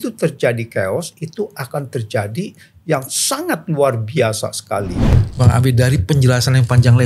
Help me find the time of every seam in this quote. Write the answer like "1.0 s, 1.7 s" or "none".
5.2 s